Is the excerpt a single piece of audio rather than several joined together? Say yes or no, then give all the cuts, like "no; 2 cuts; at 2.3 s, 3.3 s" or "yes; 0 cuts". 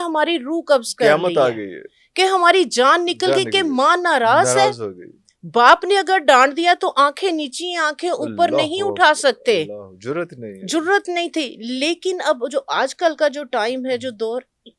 yes; 0 cuts